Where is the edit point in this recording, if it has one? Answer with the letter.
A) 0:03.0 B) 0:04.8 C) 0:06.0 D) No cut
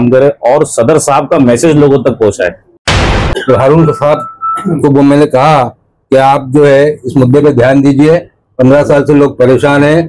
A